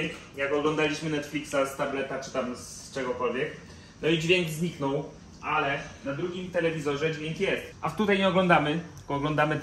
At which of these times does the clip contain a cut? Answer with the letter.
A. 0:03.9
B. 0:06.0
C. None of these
C